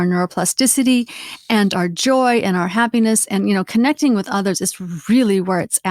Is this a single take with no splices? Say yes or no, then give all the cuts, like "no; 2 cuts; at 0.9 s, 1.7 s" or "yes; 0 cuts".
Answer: yes; 0 cuts